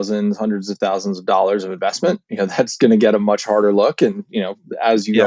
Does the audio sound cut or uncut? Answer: uncut